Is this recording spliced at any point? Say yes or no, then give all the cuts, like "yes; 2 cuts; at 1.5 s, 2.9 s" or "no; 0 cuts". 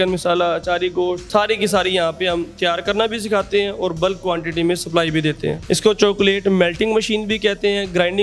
yes; 2 cuts; at 1.2 s, 5.6 s